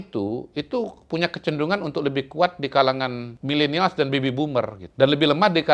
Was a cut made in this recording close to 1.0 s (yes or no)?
no